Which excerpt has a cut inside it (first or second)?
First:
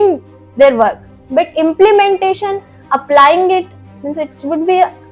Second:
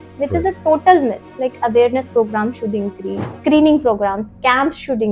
second